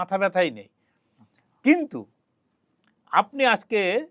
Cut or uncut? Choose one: uncut